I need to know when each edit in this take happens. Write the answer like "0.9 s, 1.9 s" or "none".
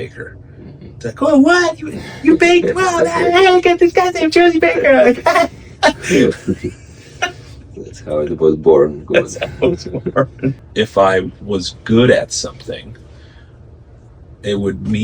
10.6 s